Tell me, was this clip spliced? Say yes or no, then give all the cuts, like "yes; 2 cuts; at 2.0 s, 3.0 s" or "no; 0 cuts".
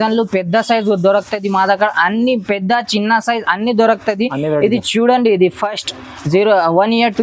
no; 0 cuts